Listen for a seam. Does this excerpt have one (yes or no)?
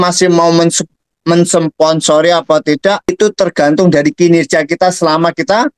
yes